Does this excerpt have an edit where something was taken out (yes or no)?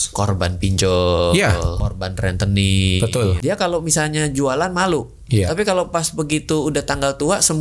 yes